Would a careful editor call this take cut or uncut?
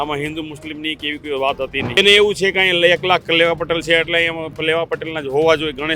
cut